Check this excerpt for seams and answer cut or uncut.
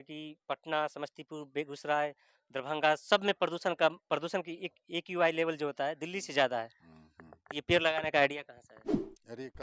uncut